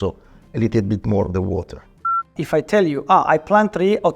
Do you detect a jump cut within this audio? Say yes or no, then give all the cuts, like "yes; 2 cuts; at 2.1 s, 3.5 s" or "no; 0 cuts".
yes; 1 cut; at 2.4 s